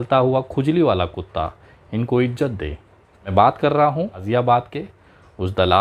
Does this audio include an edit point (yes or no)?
yes